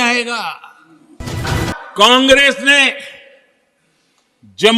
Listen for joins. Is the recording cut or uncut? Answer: cut